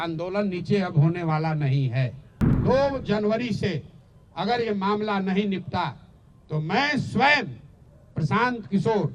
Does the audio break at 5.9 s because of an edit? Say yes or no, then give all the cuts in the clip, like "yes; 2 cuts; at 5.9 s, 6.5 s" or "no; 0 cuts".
no; 1 cut; at 2.5 s